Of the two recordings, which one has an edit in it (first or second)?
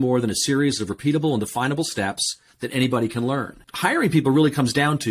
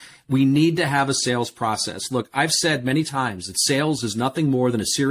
first